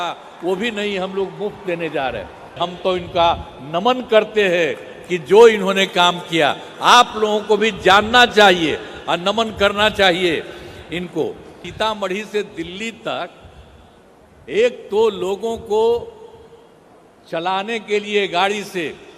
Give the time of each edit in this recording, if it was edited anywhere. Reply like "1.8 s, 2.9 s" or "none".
2.6 s, 11.6 s

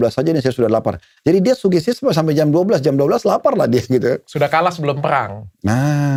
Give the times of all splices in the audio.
none

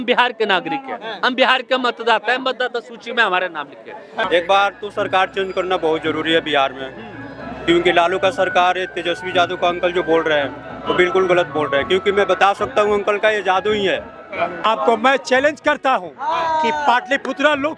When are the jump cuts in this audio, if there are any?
4.2 s, 14.7 s

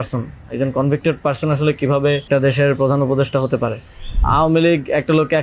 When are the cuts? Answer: 2.3 s, 4.2 s

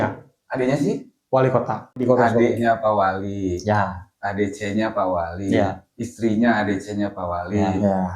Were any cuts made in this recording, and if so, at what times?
2.0 s

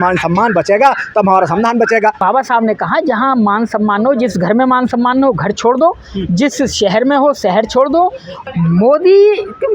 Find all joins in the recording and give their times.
2.2 s, 8.4 s

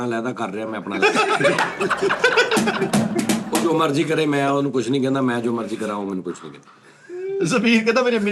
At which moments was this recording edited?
none

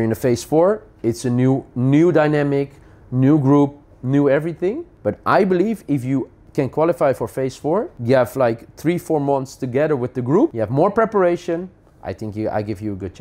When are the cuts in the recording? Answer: 4.9 s, 6.4 s, 7.9 s, 10.6 s

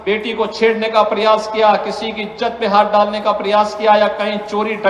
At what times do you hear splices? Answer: 3.3 s

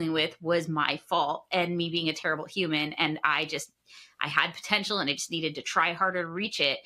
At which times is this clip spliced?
none

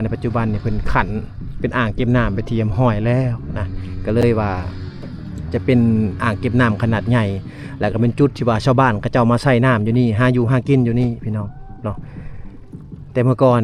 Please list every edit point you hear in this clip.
none

